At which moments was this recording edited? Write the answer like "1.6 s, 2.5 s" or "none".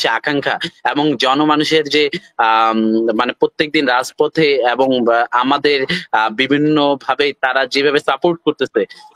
none